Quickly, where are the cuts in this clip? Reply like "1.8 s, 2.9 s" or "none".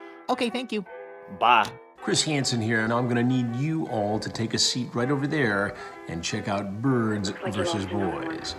1.9 s